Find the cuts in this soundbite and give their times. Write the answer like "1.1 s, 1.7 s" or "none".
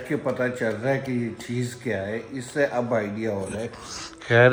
none